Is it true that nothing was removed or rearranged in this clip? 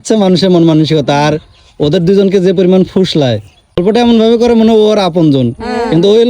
no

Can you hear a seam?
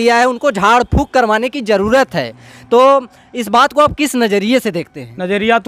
no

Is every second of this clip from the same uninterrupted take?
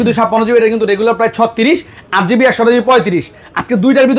yes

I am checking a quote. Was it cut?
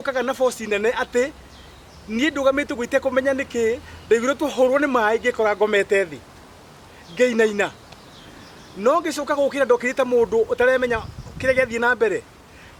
no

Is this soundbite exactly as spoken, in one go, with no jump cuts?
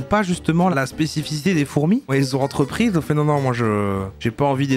no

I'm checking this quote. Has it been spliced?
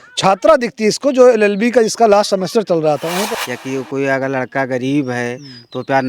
yes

